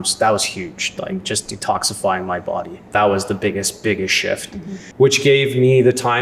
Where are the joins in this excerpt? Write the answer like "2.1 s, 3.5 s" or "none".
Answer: 2.9 s, 4.8 s